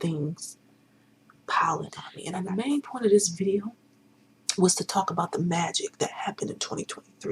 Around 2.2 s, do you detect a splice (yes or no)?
yes